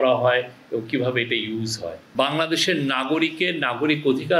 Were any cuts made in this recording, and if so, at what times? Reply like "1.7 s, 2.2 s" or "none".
2.0 s